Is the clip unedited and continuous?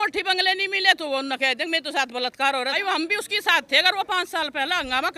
no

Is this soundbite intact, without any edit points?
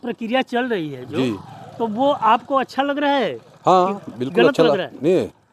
yes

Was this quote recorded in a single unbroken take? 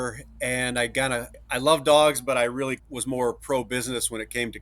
no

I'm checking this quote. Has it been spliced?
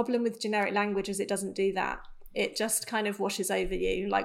no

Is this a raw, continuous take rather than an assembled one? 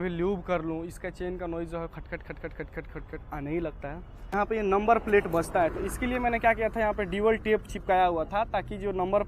no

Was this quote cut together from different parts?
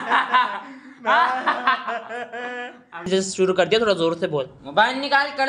yes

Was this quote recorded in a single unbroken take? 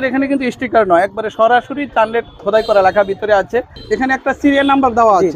no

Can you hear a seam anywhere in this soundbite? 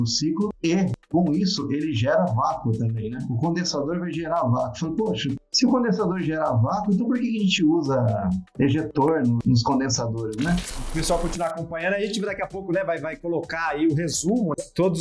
yes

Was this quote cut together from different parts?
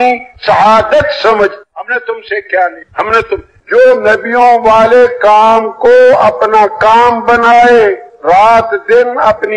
yes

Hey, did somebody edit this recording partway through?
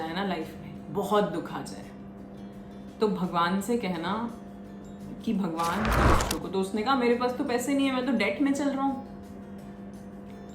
yes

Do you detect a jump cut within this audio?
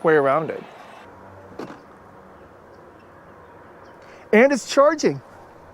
yes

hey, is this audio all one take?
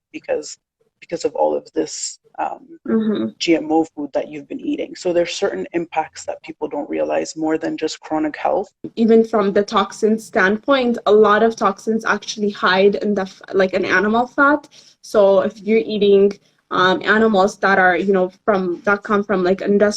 no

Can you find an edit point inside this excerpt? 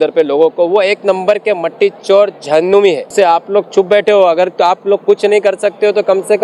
yes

